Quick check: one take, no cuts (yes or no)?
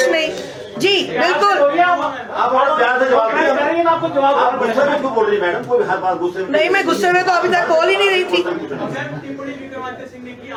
yes